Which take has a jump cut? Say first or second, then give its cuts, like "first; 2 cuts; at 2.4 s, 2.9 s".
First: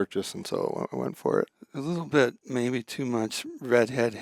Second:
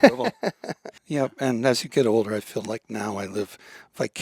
second; 1 cut; at 1.0 s